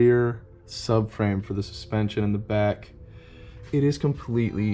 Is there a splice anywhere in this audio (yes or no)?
no